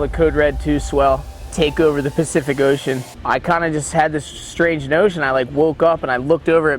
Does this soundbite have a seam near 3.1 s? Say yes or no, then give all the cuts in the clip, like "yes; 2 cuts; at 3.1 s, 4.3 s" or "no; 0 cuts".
yes; 1 cut; at 3.1 s